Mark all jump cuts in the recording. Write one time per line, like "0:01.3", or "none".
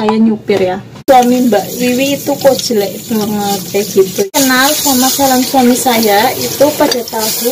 0:01.0
0:04.2